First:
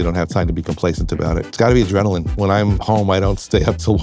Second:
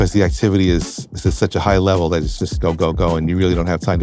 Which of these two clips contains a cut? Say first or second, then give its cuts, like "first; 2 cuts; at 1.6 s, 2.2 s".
first; 2 cuts; at 1.5 s, 2.3 s